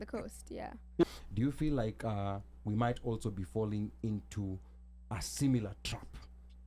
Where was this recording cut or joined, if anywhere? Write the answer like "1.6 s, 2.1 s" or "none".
1.0 s